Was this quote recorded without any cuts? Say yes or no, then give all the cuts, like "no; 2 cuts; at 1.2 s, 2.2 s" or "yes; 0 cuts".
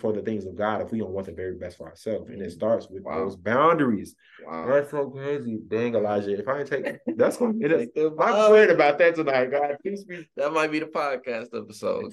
yes; 0 cuts